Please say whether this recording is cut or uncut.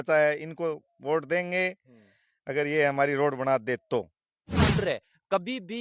cut